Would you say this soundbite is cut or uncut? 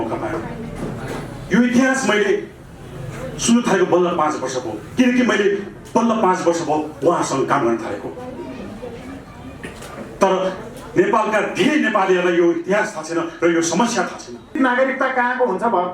cut